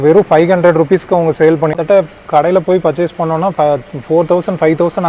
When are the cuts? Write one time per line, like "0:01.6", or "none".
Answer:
0:01.7